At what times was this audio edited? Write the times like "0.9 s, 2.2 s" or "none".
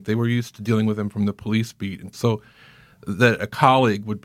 2.1 s